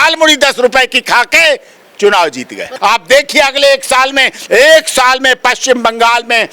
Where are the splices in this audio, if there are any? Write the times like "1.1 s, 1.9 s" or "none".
2.7 s